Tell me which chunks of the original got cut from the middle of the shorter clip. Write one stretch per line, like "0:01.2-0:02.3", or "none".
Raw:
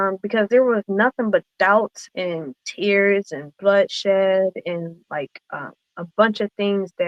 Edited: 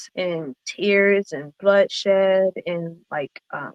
none